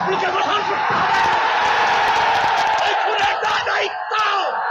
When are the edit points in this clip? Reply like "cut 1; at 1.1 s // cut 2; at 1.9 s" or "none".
none